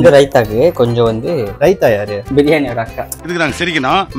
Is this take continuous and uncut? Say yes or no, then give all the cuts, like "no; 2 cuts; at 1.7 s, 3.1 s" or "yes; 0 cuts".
yes; 0 cuts